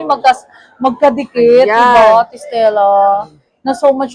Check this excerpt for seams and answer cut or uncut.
uncut